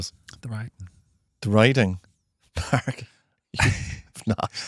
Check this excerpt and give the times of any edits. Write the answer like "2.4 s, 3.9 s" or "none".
none